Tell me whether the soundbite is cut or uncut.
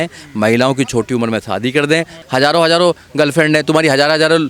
cut